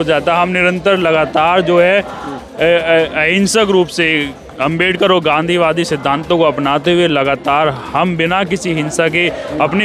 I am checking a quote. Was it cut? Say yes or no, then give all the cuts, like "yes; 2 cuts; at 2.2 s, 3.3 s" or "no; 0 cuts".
no; 0 cuts